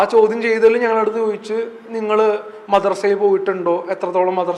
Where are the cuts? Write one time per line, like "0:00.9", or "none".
none